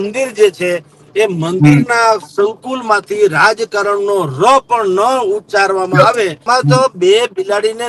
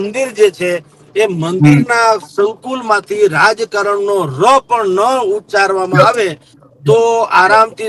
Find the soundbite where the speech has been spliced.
first; 1 cut; at 6.4 s

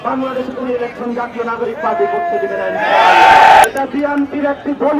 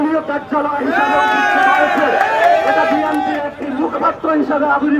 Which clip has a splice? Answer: first; 1 cut; at 3.6 s

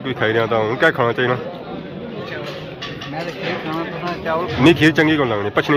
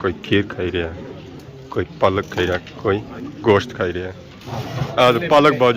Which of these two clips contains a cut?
second; 1 cut; at 4.3 s

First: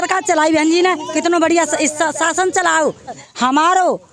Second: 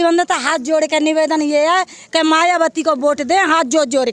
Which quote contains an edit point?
first; 1 cut; at 3.2 s

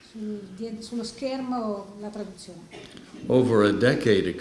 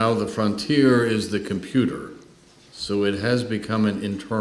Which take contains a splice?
first; 1 cut; at 2.3 s

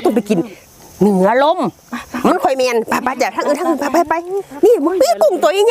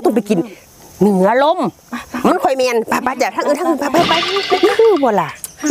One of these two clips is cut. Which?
second; 1 cut; at 4.7 s

